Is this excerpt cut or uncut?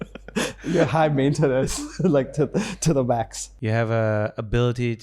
cut